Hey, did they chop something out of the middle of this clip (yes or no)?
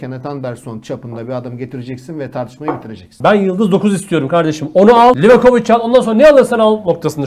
yes